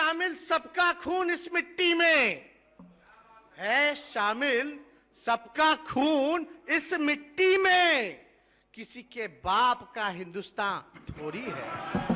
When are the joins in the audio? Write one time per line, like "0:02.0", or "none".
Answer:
none